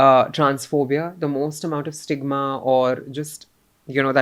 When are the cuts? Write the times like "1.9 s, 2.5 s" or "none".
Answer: none